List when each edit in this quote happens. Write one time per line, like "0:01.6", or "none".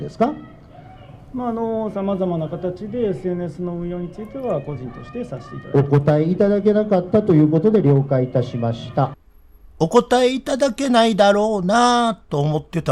0:09.1